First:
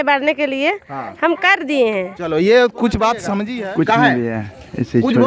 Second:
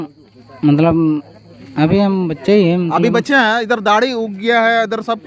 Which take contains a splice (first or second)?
first